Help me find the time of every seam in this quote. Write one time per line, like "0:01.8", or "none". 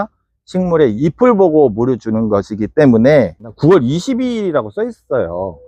0:03.5